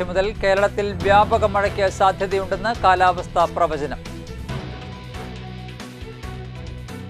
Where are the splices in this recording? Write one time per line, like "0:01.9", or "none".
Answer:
none